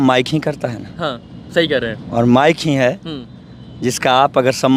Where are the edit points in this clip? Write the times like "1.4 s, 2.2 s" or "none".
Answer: none